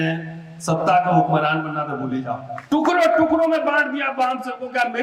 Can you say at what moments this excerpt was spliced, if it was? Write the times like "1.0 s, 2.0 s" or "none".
2.5 s